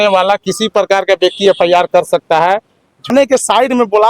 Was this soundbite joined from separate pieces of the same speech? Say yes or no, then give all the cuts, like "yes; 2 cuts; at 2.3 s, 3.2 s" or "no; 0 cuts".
yes; 1 cut; at 3.1 s